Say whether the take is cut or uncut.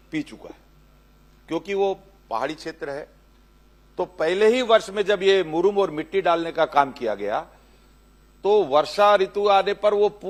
uncut